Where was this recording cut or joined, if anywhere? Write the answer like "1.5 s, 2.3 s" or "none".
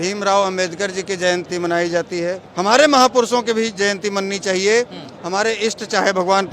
1.5 s, 2.5 s